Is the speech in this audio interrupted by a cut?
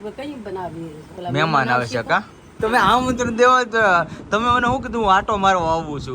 yes; 1 cut; at 2.5 s

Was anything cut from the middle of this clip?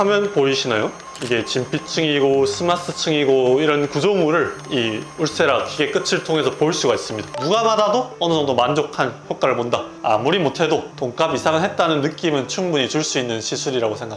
yes; 2 cuts; at 1.1 s, 7.3 s

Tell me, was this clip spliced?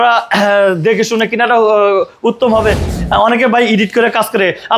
yes; 1 cut; at 2.9 s

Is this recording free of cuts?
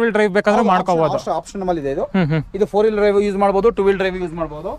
yes; 0 cuts

